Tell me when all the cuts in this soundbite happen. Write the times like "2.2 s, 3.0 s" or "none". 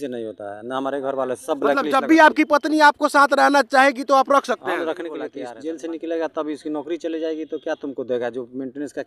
5.4 s